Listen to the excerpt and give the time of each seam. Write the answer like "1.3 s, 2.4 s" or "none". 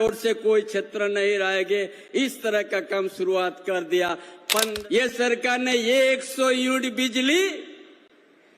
4.7 s